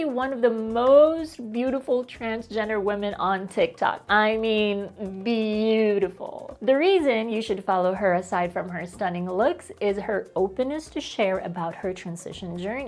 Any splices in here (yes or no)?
no